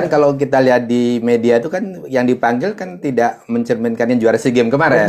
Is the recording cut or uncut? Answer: uncut